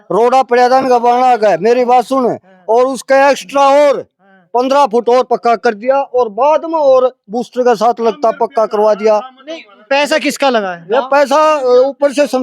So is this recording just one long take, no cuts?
yes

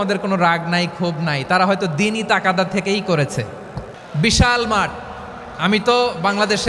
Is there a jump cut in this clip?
yes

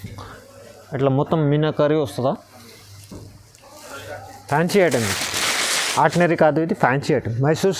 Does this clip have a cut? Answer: no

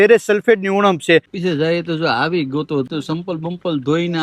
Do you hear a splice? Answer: yes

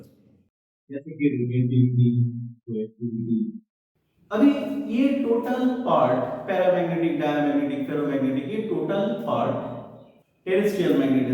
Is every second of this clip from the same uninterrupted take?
yes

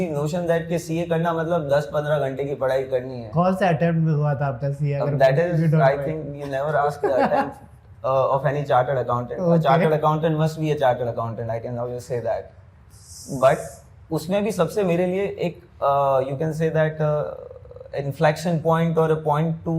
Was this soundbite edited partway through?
no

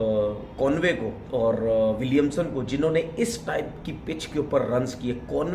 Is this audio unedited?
no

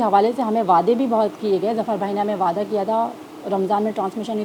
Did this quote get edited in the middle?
no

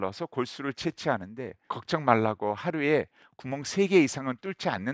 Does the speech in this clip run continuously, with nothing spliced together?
no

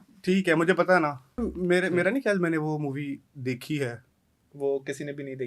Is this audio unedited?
no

